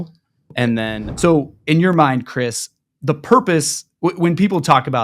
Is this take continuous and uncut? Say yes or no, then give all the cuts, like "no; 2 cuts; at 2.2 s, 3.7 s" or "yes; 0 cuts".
no; 1 cut; at 0.9 s